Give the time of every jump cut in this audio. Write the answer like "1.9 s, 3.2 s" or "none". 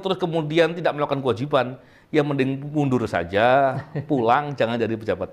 none